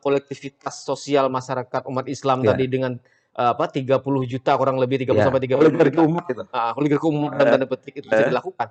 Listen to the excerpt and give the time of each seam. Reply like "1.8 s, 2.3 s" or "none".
none